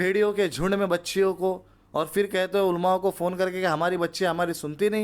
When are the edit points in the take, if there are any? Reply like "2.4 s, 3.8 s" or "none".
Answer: none